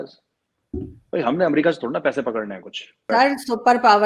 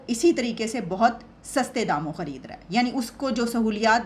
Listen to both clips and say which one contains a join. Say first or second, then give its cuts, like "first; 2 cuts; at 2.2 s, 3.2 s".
first; 1 cut; at 3.1 s